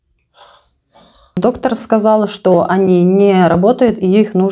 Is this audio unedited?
no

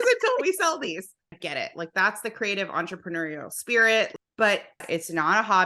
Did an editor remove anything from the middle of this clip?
yes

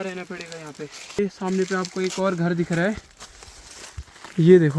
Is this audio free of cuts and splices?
yes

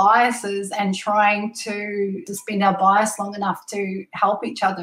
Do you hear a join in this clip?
yes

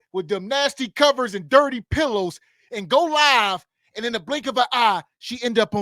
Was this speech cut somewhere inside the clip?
no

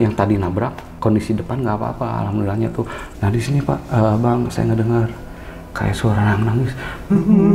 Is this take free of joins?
yes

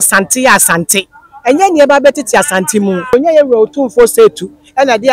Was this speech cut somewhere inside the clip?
yes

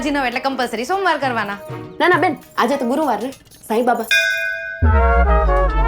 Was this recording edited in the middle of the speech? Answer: no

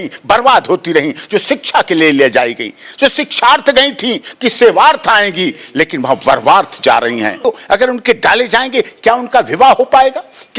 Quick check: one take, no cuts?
no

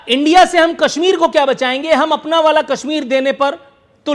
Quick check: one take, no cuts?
yes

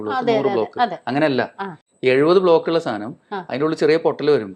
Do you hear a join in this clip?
no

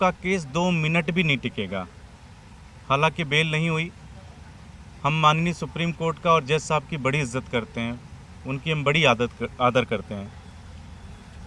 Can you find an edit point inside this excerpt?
no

